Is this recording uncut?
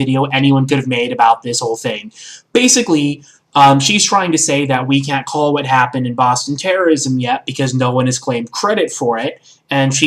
no; 1 cut; at 1.5 s

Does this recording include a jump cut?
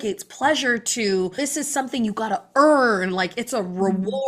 yes; 1 cut; at 1.4 s

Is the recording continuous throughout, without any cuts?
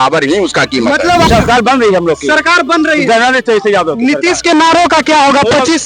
no; 1 cut; at 1.3 s

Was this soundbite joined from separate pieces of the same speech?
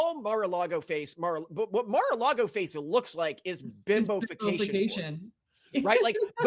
no; 0 cuts

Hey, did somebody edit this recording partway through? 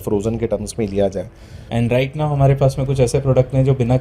yes; 1 cut; at 1.7 s

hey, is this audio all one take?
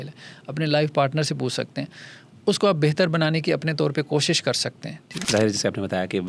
no; 1 cut; at 5.1 s

